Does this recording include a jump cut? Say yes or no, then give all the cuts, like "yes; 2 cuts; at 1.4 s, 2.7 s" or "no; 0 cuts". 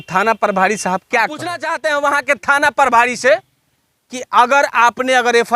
yes; 1 cut; at 1.7 s